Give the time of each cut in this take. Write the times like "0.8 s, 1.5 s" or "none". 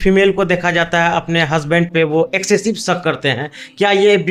none